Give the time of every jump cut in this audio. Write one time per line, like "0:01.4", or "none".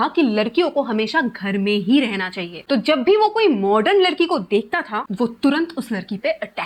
none